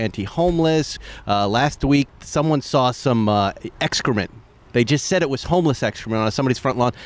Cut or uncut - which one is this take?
cut